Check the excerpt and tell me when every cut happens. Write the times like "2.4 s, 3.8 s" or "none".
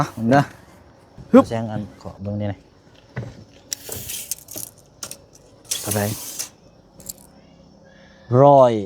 1.5 s